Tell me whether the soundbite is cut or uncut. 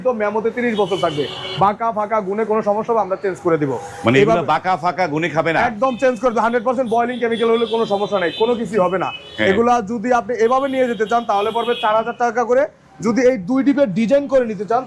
uncut